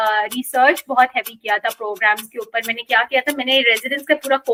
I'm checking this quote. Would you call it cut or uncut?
uncut